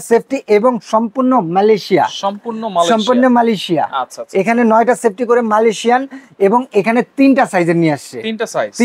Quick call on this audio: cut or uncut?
uncut